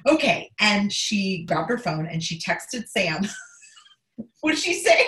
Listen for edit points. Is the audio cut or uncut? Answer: cut